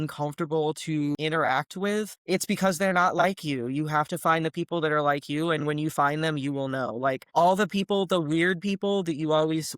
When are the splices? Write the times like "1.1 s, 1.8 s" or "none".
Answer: 1.2 s, 2.2 s, 7.2 s